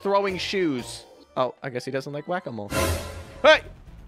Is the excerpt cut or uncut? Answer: cut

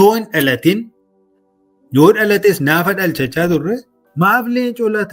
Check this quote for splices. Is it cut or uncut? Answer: cut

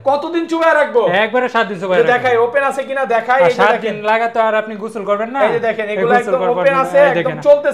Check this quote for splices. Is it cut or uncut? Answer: uncut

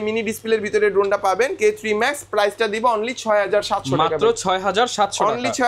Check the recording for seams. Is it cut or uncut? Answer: uncut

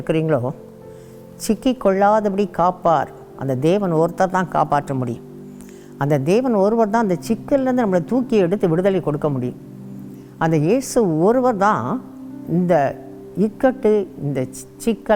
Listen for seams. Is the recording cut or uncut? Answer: uncut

